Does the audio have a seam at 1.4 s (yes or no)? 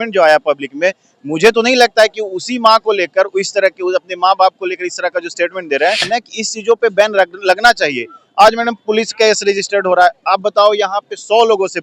no